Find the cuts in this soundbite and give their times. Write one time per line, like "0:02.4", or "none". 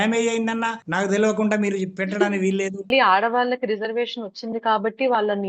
0:02.9

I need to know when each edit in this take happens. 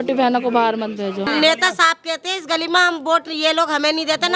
0:01.3

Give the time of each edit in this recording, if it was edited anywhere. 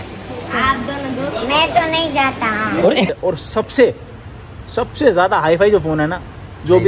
0:03.1

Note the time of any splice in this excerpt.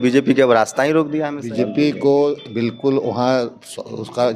0:01.4

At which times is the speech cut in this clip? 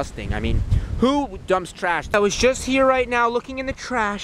0:02.1

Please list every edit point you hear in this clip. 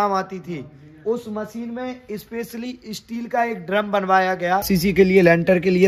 0:04.7

